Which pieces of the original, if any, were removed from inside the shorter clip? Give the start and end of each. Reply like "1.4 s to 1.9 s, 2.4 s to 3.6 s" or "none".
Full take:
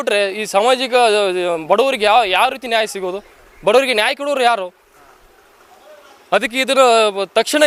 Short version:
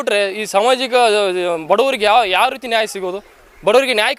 none